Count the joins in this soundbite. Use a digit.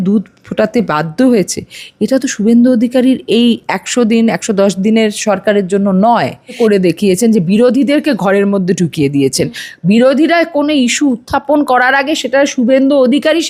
1